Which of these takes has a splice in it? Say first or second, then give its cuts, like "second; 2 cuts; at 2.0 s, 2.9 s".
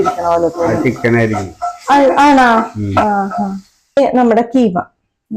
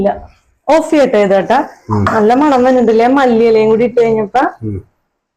first; 1 cut; at 4.0 s